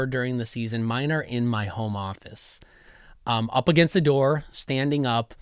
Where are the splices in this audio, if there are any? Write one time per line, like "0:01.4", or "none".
none